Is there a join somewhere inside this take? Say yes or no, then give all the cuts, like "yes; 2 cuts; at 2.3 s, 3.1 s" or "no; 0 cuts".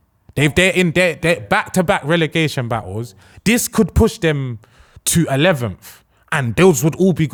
no; 0 cuts